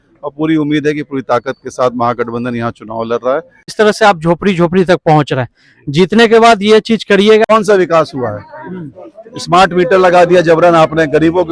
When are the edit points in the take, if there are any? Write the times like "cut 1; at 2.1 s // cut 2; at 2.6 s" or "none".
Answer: cut 1; at 3.7 s // cut 2; at 7.4 s